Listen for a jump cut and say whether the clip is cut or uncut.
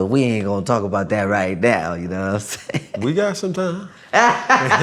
uncut